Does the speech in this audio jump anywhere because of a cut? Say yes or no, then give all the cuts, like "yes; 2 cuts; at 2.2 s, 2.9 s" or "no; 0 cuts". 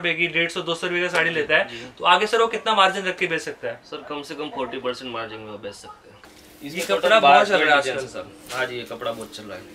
yes; 1 cut; at 6.2 s